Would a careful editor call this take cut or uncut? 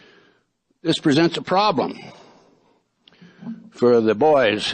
cut